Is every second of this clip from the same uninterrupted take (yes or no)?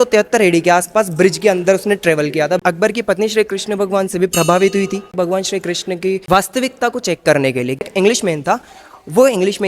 no